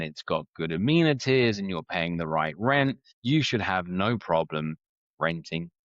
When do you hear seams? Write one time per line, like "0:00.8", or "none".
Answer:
0:03.1